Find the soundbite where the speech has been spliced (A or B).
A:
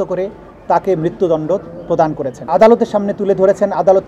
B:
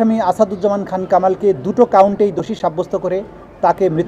A